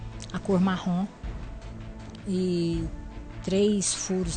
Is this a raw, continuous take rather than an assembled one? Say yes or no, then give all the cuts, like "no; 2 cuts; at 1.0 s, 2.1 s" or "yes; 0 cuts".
yes; 0 cuts